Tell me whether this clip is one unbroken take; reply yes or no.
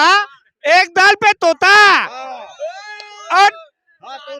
yes